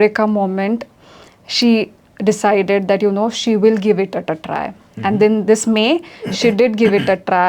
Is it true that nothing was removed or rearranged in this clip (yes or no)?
yes